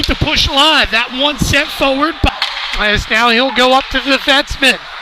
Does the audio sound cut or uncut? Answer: cut